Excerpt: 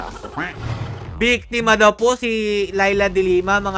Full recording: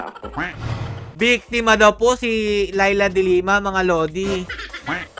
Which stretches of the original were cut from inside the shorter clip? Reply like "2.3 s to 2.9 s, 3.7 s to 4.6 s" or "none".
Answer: none